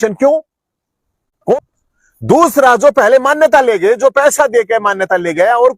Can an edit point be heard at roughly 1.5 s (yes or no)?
yes